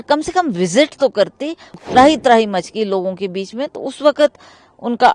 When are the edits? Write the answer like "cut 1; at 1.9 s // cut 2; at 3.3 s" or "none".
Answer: cut 1; at 1.8 s